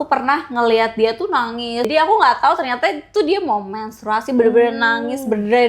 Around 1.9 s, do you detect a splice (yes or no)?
yes